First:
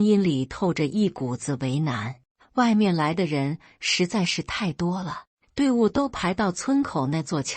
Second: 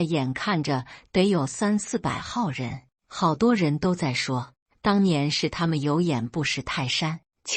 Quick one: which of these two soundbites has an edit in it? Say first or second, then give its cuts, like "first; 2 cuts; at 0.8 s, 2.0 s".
first; 1 cut; at 2.3 s